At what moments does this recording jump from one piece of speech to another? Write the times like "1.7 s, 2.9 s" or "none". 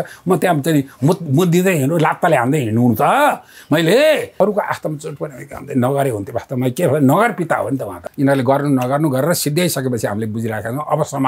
4.4 s, 8.0 s